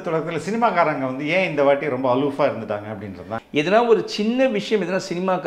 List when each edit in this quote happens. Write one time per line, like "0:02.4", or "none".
0:03.3

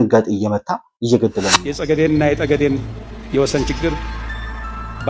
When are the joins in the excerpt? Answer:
0:01.7

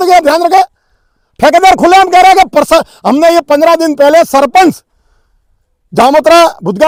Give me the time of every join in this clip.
none

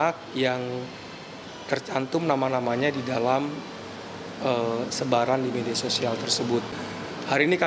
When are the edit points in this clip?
0:06.7

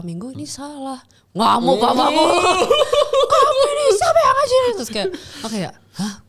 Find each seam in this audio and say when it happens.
none

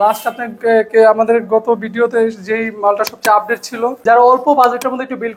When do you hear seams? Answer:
0:04.0

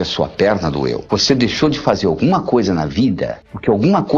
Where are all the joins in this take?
0:01.0

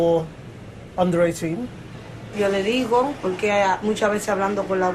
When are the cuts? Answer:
none

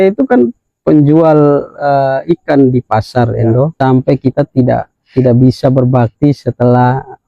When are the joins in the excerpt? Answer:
0:03.7

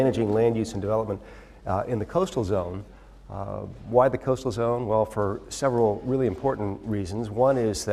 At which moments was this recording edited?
none

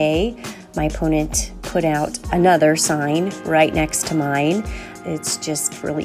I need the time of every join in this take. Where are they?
0:04.9

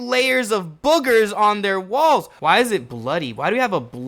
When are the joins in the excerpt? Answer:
0:02.3

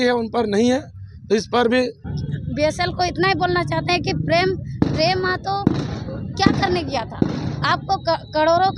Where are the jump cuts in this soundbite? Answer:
0:02.1

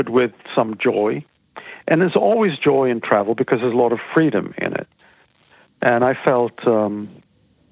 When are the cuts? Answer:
none

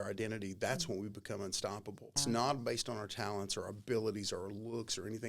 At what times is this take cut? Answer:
0:02.2

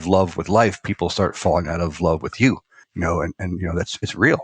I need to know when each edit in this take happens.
0:02.9

